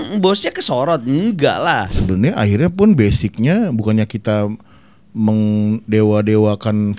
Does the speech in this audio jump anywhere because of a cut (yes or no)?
yes